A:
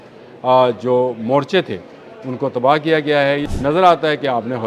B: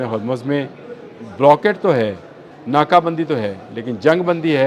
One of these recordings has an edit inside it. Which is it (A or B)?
A